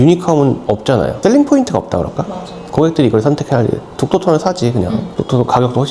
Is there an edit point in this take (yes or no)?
no